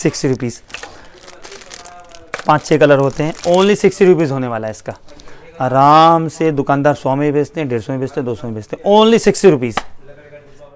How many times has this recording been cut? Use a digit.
0